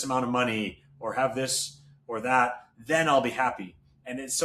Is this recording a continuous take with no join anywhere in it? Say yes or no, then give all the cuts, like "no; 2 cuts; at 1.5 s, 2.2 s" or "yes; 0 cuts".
yes; 0 cuts